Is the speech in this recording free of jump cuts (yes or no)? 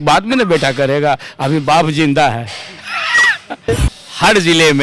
no